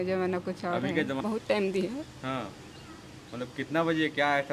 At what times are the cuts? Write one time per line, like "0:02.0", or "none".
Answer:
0:01.2